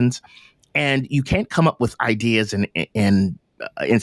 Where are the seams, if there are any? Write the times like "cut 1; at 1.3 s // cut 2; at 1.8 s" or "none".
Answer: none